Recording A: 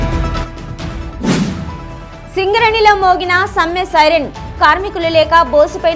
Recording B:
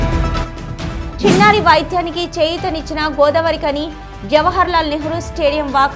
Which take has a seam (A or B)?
A